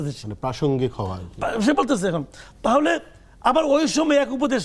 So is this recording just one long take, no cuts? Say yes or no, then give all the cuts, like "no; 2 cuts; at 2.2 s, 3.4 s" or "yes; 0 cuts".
yes; 0 cuts